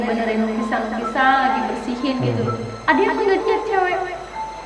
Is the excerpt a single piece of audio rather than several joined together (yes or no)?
yes